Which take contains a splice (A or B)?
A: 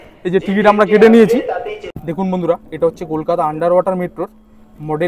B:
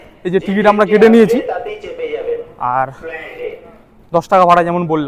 A